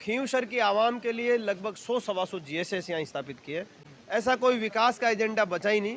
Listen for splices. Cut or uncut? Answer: uncut